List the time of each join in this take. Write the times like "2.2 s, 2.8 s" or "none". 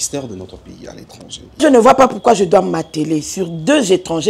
1.6 s